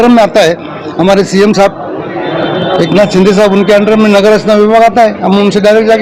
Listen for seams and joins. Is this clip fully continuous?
yes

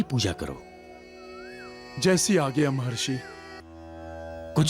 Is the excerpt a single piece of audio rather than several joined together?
no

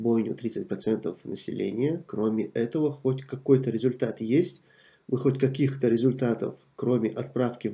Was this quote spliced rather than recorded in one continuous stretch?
no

